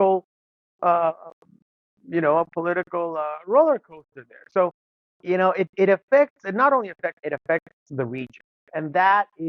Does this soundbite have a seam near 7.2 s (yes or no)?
yes